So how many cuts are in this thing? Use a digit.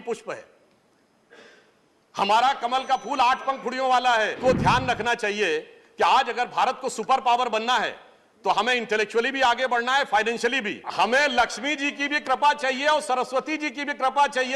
2